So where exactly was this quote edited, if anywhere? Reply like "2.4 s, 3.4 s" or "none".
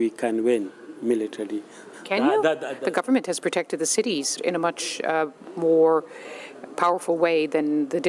1.9 s